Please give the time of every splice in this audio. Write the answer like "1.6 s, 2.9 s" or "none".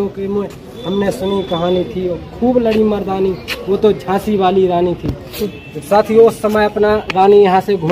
5.3 s